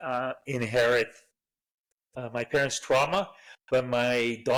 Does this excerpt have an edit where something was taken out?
no; 0 cuts

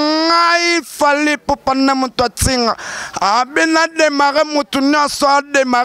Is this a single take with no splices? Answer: yes; 0 cuts

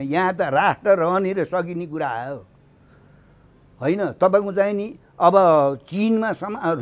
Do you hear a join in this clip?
no; 0 cuts

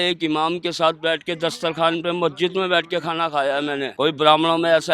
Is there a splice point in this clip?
yes; 1 cut; at 3.9 s

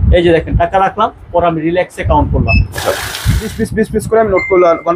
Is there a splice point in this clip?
yes; 1 cut; at 3.5 s

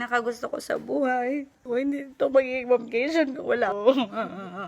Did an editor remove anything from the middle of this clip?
yes; 2 cuts; at 1.7 s, 3.7 s

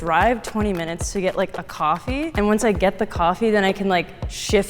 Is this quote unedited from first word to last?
yes; 0 cuts

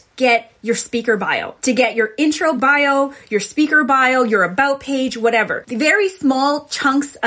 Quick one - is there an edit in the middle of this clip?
yes; 3 cuts; at 1.5 s, 2.6 s, 5.6 s

